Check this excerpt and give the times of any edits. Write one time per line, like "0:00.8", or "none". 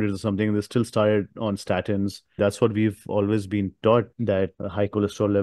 0:02.4
0:04.1

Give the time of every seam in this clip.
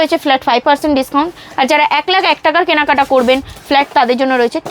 none

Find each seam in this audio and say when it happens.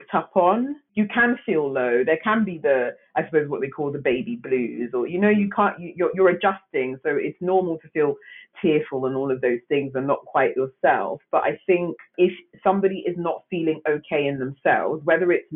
0:00.9
0:12.1

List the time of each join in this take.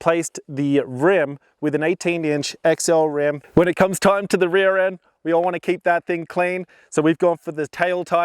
0:03.4

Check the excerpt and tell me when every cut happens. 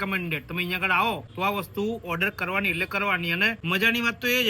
0:01.3
0:03.6

